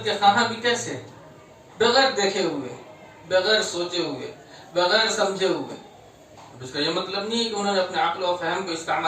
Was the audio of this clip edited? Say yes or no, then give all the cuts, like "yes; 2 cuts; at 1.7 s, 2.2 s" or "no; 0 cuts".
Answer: no; 0 cuts